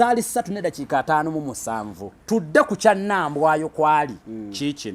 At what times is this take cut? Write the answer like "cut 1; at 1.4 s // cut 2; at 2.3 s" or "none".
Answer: cut 1; at 2.1 s